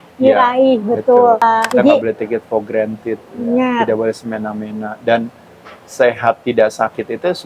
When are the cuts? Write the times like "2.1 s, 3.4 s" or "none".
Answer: 2.0 s